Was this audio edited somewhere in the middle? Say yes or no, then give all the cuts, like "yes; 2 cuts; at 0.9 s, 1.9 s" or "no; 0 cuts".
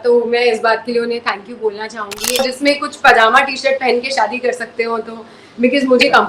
yes; 1 cut; at 2.4 s